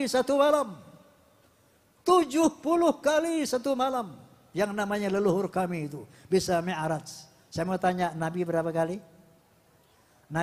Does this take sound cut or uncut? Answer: uncut